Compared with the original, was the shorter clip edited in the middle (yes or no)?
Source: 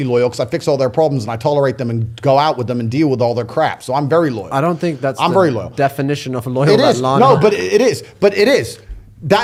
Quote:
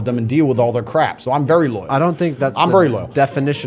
no